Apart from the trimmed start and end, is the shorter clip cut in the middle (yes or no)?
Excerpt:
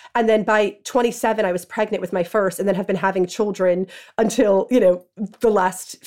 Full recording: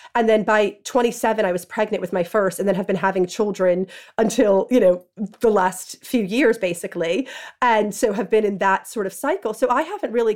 no